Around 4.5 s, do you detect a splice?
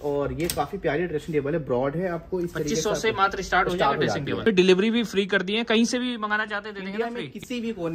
yes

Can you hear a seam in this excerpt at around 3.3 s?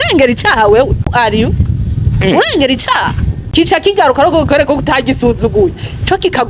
yes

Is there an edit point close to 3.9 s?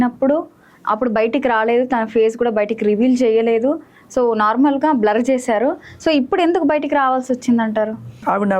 no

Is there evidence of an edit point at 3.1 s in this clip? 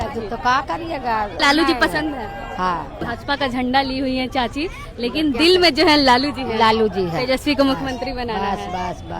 yes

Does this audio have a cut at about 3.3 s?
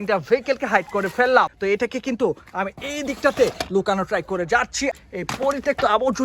no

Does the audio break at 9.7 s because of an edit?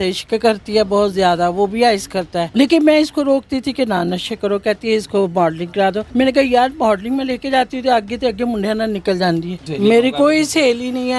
yes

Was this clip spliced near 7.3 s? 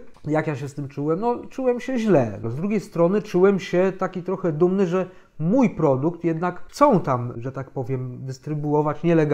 yes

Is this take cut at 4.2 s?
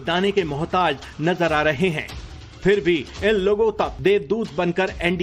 yes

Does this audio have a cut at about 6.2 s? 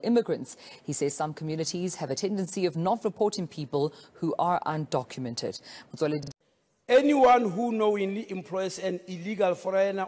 yes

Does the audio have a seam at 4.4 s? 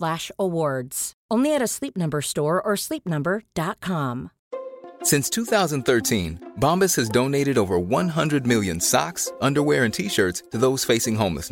yes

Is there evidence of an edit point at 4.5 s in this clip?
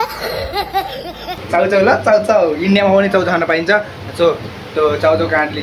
no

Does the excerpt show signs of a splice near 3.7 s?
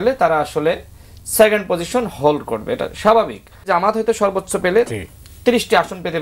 yes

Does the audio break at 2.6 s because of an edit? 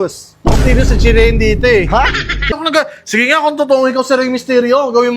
yes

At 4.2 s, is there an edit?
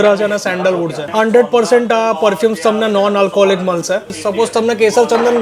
yes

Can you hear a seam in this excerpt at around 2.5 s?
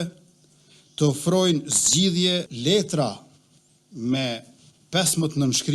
yes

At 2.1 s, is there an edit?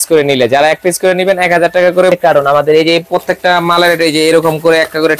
yes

